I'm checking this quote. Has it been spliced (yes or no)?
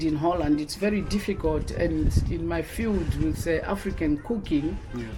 no